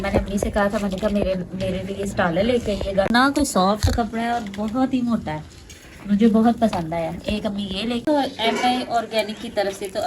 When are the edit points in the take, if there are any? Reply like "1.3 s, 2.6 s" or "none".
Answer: 3.1 s, 8.0 s